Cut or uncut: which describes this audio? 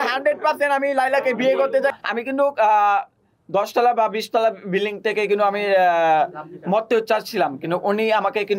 cut